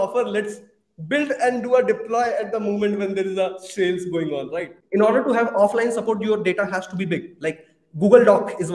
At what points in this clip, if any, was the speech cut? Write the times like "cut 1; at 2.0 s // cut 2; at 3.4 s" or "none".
cut 1; at 4.7 s